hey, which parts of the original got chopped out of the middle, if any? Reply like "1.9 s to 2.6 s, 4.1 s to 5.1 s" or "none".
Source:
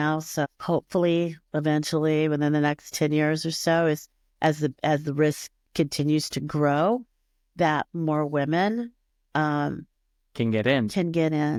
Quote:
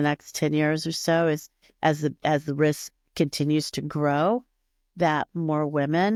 none